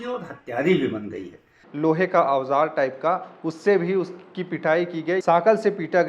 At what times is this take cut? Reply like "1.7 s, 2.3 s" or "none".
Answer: 1.6 s, 5.2 s